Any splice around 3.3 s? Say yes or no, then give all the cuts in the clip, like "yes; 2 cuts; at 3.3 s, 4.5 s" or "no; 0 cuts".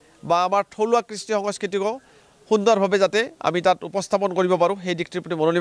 no; 0 cuts